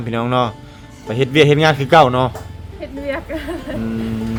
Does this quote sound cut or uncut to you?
uncut